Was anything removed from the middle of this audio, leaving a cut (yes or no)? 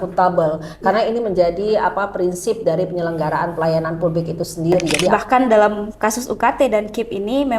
yes